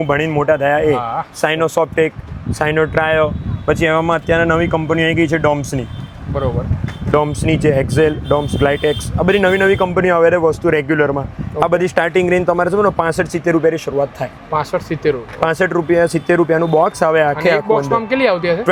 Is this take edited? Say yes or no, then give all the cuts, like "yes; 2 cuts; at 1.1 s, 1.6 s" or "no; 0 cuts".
no; 0 cuts